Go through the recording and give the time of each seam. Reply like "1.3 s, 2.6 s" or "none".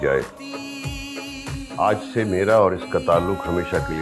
1.6 s